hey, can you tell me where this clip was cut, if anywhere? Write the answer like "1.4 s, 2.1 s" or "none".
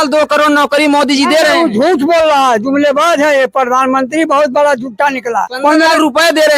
5.5 s